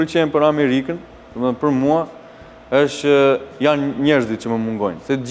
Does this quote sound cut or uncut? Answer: uncut